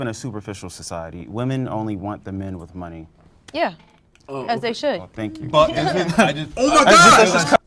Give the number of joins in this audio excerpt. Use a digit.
0